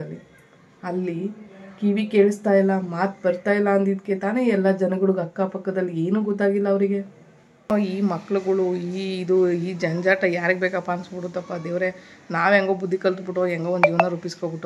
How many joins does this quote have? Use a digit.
1